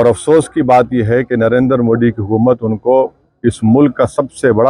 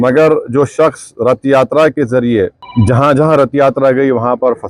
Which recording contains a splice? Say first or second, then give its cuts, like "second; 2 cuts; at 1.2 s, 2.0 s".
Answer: second; 1 cut; at 2.6 s